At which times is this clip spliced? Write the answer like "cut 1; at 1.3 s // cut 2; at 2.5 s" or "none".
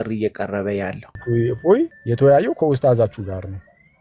cut 1; at 1.1 s // cut 2; at 2.0 s